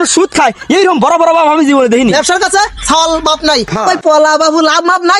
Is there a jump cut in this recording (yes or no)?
yes